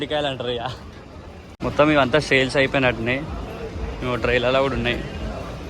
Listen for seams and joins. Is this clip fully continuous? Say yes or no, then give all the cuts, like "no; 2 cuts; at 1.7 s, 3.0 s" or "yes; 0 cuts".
no; 1 cut; at 1.5 s